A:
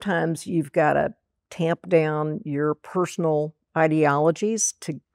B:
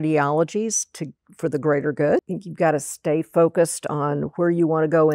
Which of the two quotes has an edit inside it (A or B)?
B